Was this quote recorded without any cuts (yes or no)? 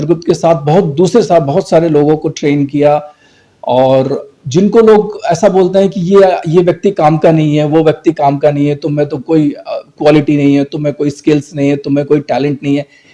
yes